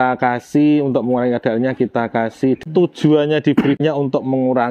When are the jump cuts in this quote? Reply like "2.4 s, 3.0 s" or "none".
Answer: 2.6 s, 3.8 s